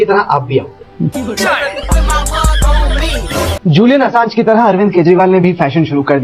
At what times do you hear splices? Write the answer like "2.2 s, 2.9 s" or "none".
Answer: 3.5 s